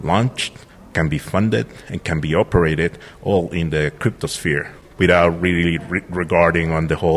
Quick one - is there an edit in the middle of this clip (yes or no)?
no